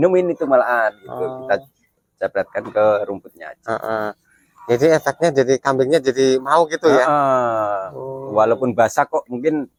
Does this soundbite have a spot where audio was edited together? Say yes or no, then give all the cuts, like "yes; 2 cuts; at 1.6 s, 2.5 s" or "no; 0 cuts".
no; 0 cuts